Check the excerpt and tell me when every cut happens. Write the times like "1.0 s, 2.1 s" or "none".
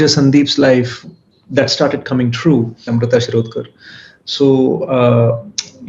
2.9 s